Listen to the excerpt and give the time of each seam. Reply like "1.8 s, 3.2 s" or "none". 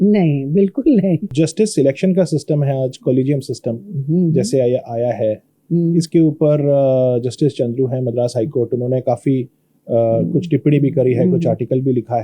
1.3 s